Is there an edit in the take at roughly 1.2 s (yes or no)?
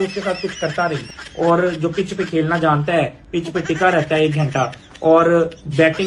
yes